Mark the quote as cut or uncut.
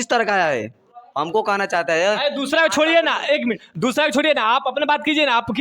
uncut